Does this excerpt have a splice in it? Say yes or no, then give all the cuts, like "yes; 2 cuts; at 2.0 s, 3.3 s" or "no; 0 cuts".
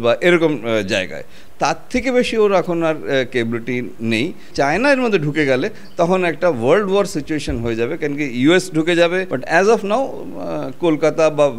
yes; 2 cuts; at 4.5 s, 9.3 s